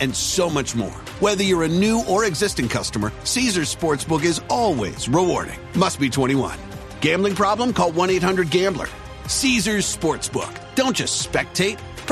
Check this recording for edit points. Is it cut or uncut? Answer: uncut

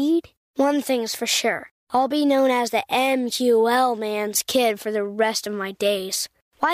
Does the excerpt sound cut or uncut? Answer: uncut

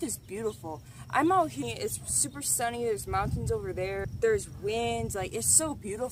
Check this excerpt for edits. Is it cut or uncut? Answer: uncut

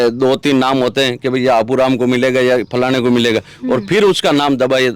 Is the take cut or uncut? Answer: uncut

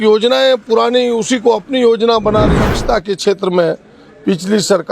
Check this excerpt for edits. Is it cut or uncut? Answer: cut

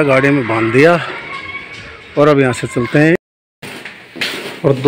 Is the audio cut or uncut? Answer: cut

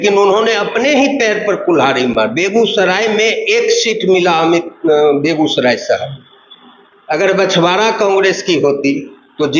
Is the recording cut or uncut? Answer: uncut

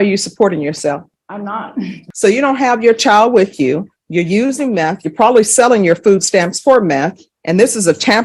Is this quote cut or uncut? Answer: cut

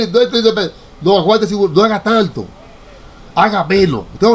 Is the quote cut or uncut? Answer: uncut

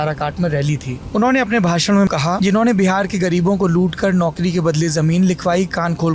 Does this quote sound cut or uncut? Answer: cut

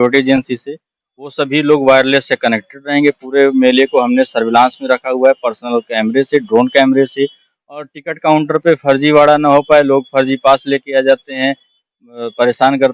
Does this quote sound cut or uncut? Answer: uncut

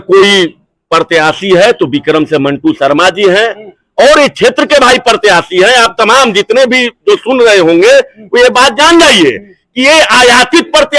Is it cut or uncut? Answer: uncut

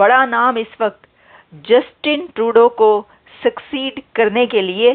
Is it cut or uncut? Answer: uncut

